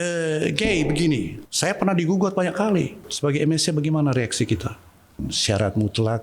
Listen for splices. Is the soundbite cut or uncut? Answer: cut